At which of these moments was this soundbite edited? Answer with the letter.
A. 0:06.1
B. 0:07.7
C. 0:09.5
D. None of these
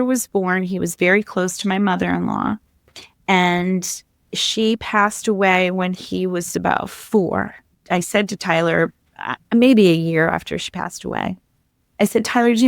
B